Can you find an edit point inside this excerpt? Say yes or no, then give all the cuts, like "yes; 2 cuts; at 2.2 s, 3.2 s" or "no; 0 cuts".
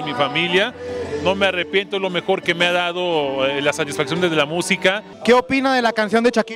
yes; 1 cut; at 5.1 s